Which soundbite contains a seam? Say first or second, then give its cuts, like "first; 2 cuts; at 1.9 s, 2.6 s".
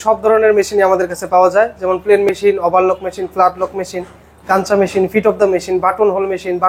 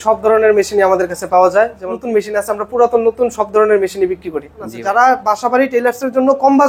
second; 2 cuts; at 1.9 s, 4.7 s